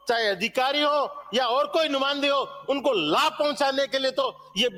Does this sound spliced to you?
no; 0 cuts

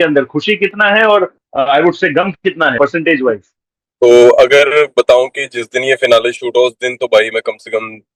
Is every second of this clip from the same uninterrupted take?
yes; 0 cuts

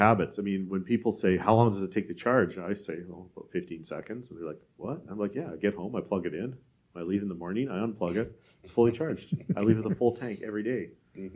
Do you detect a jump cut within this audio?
no; 0 cuts

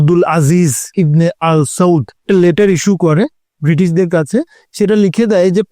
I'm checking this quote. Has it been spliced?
yes; 3 cuts; at 0.9 s, 2.2 s, 4.6 s

